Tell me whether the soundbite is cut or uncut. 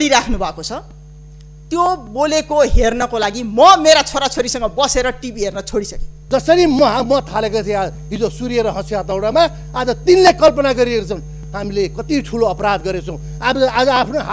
cut